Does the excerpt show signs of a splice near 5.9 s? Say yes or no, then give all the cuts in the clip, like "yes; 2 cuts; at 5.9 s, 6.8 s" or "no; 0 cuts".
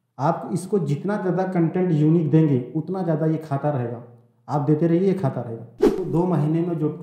yes; 1 cut; at 5.9 s